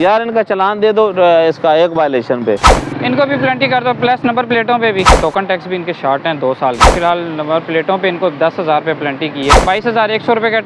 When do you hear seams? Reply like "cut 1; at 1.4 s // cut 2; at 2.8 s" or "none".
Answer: cut 1; at 2.7 s // cut 2; at 5.2 s // cut 3; at 6.9 s // cut 4; at 9.6 s